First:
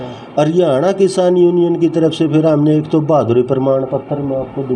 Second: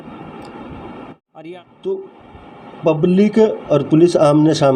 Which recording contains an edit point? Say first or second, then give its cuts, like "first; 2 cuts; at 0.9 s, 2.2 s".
second; 1 cut; at 1.2 s